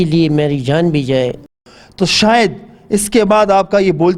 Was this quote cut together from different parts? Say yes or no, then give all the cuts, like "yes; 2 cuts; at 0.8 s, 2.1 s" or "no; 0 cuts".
yes; 1 cut; at 1.6 s